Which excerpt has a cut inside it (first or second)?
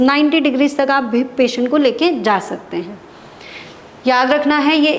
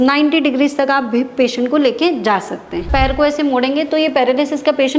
second